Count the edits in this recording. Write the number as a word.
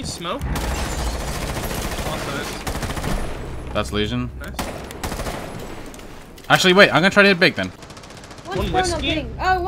one